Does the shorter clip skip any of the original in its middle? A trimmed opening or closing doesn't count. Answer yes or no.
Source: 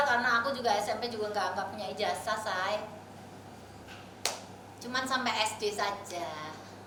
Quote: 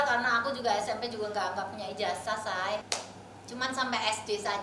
yes